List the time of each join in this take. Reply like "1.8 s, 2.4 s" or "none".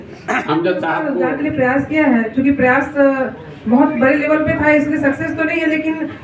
1.2 s